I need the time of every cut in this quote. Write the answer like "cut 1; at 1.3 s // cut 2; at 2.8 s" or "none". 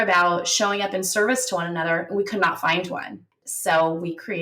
cut 1; at 3.3 s